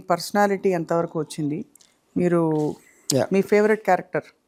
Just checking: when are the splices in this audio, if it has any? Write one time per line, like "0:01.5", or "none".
none